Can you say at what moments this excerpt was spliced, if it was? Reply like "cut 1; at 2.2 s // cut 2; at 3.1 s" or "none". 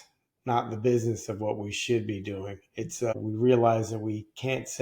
cut 1; at 3.1 s

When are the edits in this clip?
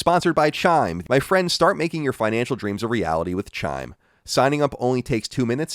cut 1; at 1.0 s

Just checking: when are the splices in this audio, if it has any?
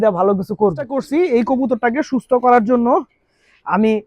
cut 1; at 1.0 s

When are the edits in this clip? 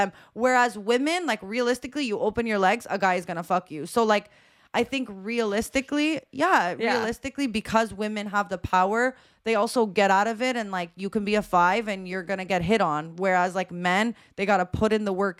none

